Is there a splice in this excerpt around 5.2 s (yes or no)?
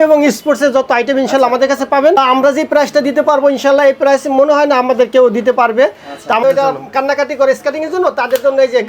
no